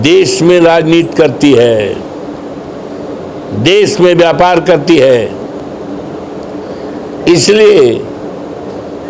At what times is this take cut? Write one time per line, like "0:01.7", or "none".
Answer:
none